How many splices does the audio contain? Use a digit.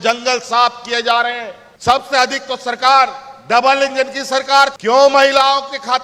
1